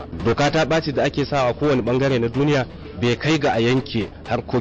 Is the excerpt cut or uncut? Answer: uncut